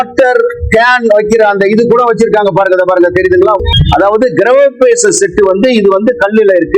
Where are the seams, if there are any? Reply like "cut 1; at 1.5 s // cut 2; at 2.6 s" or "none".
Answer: cut 1; at 3.6 s